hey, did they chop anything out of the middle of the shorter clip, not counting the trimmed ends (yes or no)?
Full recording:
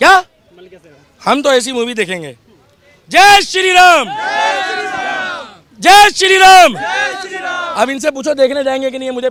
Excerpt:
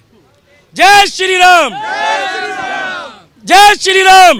no